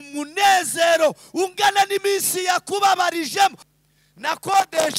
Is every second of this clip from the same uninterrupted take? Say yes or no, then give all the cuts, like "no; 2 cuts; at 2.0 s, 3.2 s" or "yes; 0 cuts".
no; 1 cut; at 3.7 s